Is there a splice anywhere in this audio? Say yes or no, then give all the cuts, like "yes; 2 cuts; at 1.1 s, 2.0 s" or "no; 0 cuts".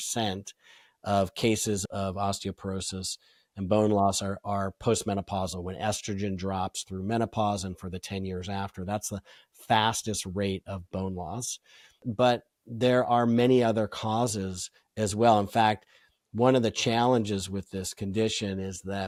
no; 0 cuts